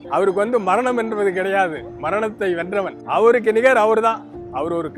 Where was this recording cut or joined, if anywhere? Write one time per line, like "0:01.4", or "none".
0:03.0